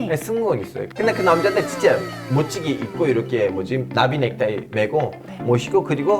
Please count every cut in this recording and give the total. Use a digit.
1